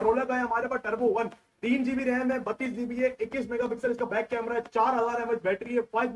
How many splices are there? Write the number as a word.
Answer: zero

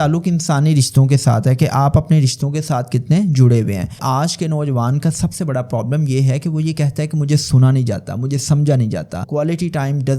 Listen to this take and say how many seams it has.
two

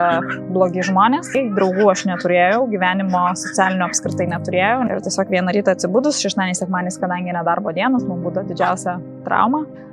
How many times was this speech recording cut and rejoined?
two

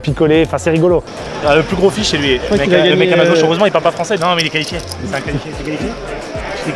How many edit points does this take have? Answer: one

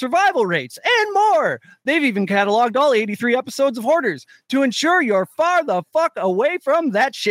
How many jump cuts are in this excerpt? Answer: zero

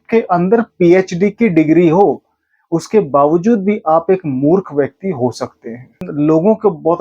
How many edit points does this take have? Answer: one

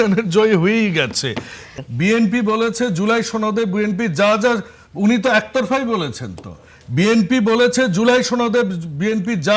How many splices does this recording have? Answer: one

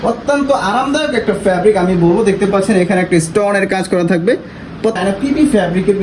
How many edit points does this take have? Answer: one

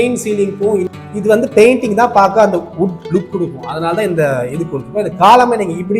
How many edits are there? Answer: one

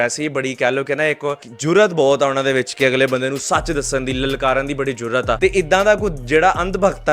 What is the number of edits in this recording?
two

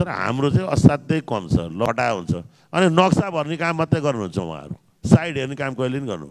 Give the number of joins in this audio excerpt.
one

